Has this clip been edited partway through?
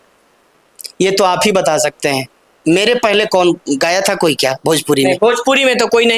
no; 0 cuts

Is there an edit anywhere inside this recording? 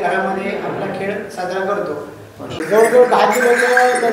yes; 1 cut; at 2.6 s

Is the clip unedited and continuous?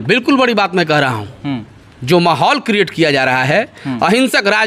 yes; 0 cuts

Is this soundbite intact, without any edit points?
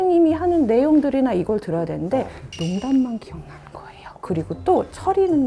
no; 1 cut; at 4.2 s

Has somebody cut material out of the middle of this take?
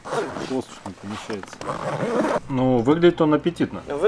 yes; 1 cut; at 2.5 s

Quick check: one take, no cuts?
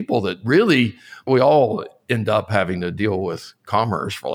no; 1 cut; at 1.2 s

